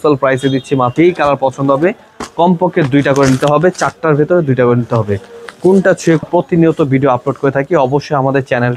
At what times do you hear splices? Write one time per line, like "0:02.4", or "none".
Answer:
0:00.9
0:06.2

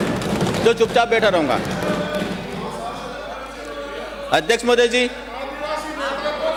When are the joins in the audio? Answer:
none

